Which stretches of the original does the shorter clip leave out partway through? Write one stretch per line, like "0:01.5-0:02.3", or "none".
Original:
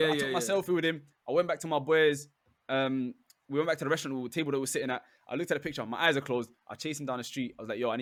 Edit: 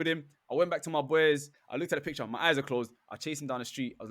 0:02.4-0:05.2